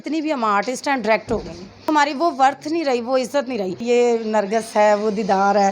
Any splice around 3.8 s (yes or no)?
yes